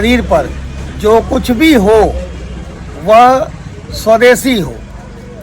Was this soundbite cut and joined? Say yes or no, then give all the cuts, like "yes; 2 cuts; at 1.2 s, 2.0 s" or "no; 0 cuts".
no; 0 cuts